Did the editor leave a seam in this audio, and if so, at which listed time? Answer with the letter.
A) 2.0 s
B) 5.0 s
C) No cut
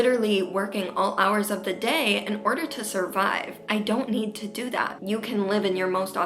B